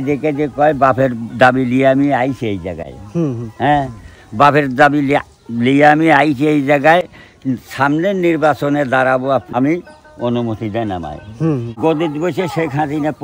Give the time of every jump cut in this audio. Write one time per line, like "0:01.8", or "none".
0:09.5
0:11.7